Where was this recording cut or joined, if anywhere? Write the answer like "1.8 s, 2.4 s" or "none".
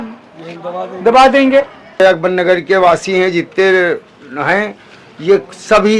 2.0 s